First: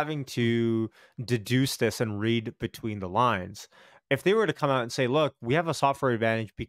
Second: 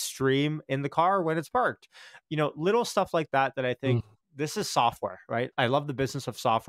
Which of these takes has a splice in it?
second; 2 cuts; at 4.0 s, 5.5 s

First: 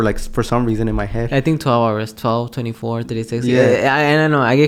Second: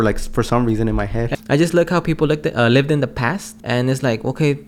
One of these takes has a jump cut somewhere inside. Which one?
second; 2 cuts; at 1.3 s, 3.6 s

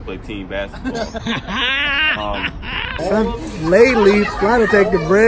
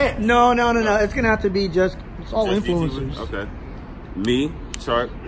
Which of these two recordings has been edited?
first; 1 cut; at 2.9 s

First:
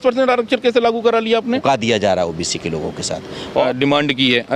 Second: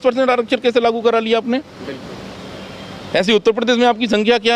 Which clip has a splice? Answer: first; 2 cuts; at 1.6 s, 3.6 s

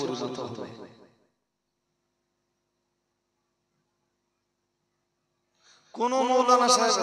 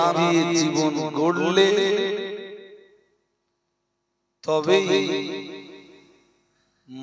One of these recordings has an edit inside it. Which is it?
first; 1 cut; at 1.1 s

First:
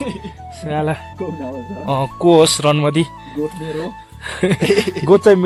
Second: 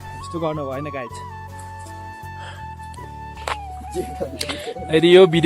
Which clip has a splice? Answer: second; 1 cut; at 3.3 s

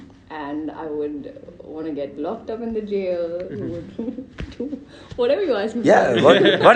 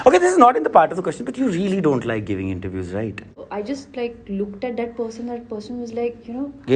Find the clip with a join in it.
second; 1 cut; at 3.4 s

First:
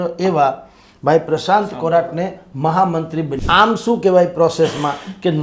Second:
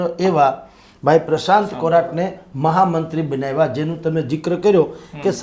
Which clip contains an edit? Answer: first; 1 cut; at 3.4 s

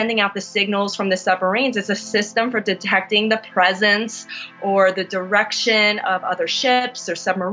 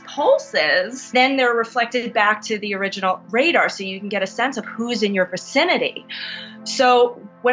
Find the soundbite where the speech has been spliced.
second; 1 cut; at 1.1 s

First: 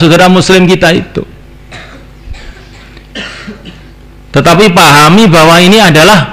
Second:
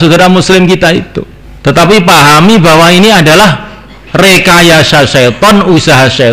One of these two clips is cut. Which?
second; 1 cut; at 1.9 s

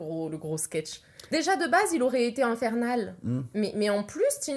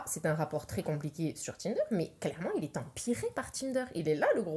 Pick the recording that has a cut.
first; 1 cut; at 1.3 s

